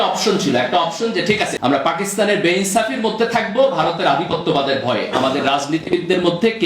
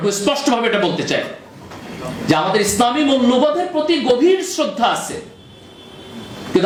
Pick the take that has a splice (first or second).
first